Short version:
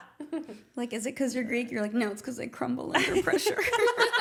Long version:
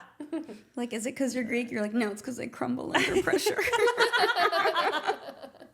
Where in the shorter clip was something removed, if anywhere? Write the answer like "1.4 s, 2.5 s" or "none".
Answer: none